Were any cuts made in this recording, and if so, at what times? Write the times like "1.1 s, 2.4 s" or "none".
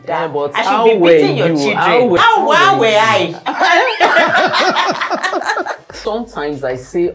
2.2 s, 6.0 s